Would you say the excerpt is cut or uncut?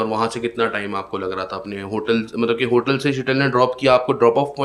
uncut